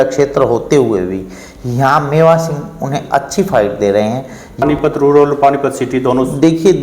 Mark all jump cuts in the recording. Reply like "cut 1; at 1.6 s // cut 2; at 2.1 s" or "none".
cut 1; at 4.6 s